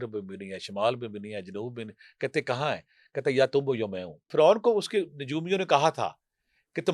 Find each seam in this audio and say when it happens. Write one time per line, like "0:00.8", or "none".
0:04.3